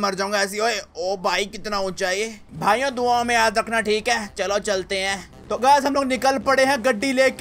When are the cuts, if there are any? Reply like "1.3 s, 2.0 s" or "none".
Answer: 2.5 s